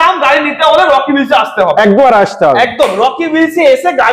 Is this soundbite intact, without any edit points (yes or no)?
yes